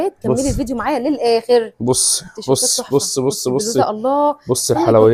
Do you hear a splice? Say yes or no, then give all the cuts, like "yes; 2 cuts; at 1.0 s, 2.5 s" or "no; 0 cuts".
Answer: no; 0 cuts